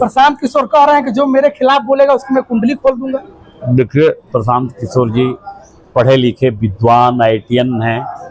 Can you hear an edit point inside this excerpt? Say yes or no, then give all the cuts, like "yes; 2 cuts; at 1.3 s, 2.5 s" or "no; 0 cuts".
no; 0 cuts